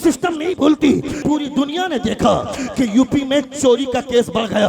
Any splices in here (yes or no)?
yes